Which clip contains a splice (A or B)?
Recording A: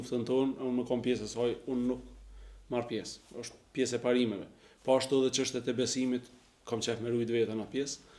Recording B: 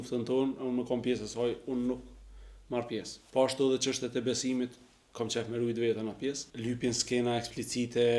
B